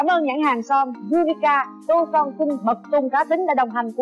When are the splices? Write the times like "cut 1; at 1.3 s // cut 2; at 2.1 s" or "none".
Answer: cut 1; at 1.0 s